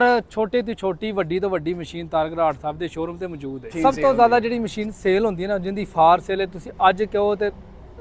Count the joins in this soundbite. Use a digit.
1